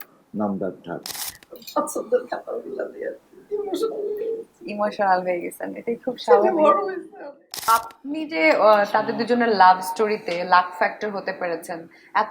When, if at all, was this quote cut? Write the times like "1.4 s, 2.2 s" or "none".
1.2 s, 7.7 s